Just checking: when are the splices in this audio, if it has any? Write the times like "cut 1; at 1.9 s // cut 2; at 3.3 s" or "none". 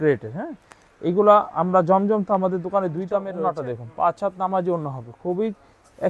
cut 1; at 3.3 s